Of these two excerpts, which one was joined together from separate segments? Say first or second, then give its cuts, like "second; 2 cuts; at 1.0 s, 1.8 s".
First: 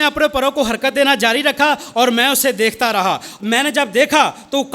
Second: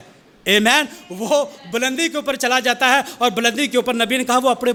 first; 1 cut; at 3.3 s